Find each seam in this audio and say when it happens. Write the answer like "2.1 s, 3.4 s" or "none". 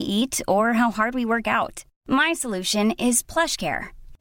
none